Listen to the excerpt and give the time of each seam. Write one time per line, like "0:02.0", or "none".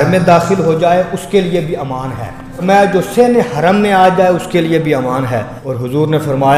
0:02.6
0:05.6